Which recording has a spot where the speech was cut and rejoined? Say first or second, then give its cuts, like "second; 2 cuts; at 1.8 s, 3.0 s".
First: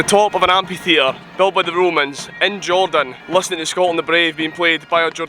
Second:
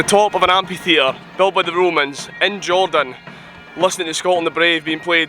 first; 1 cut; at 3.2 s